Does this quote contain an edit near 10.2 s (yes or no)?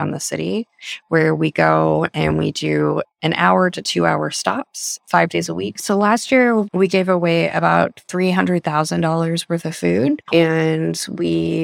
yes